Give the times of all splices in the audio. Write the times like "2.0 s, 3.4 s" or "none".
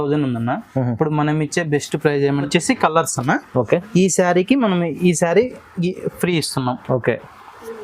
2.5 s